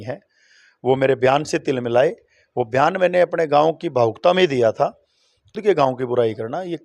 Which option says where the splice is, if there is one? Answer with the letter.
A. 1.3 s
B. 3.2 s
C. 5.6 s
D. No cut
C